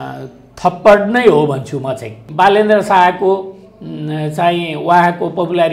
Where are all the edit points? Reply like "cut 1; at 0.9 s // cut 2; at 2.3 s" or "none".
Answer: cut 1; at 2.2 s